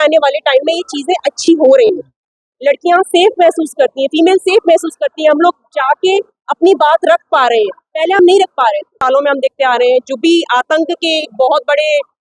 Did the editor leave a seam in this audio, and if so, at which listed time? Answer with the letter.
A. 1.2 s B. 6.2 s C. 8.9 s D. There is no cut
C